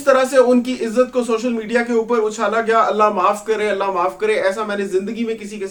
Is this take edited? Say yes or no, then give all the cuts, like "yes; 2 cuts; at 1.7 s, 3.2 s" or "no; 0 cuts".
no; 0 cuts